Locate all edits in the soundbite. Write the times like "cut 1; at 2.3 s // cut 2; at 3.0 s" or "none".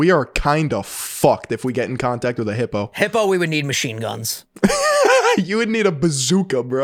none